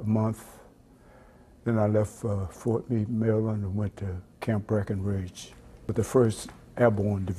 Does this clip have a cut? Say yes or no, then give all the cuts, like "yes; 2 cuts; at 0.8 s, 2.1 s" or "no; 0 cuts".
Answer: yes; 1 cut; at 5.9 s